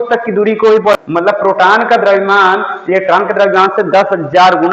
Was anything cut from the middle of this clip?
yes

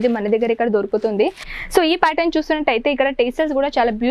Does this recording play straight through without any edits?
no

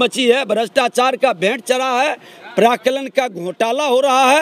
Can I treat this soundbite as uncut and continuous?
yes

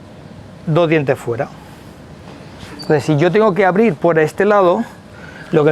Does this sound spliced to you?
no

